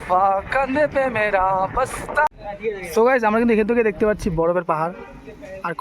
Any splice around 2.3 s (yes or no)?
yes